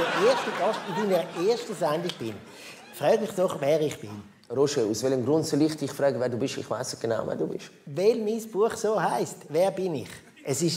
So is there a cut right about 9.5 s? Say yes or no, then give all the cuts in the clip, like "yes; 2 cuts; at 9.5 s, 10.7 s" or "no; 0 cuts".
no; 1 cut; at 4.9 s